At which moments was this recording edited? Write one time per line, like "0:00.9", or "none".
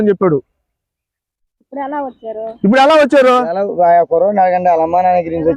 none